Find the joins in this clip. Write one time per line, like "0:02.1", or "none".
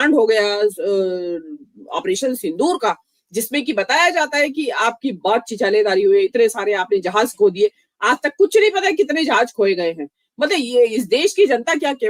none